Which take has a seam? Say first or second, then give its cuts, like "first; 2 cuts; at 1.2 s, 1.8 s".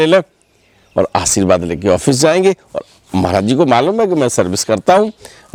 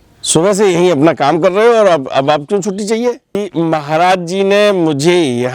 second; 1 cut; at 3.4 s